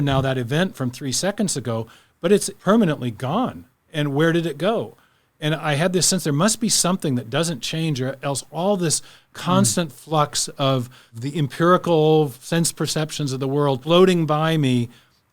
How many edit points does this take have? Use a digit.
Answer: 3